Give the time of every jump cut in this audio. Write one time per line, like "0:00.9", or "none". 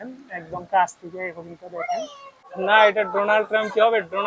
0:02.4